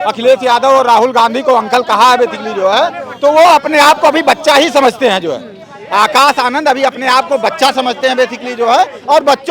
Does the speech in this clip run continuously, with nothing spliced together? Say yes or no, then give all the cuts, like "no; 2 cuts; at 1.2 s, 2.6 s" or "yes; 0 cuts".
yes; 0 cuts